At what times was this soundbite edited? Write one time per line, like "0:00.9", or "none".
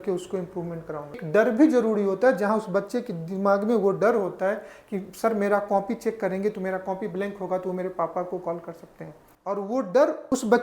0:01.1